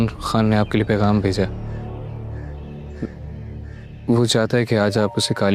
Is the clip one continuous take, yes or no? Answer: no